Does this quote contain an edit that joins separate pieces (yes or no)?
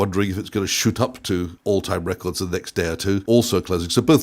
yes